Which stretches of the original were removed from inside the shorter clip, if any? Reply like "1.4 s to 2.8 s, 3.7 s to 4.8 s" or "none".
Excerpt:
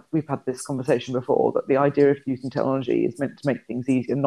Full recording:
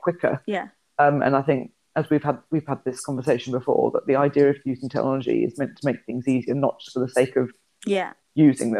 none